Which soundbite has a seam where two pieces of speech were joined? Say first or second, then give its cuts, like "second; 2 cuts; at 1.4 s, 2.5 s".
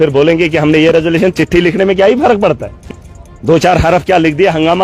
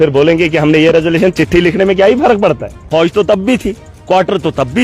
second; 1 cut; at 2.7 s